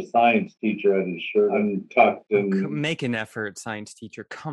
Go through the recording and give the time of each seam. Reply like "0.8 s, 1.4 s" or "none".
1.6 s, 2.7 s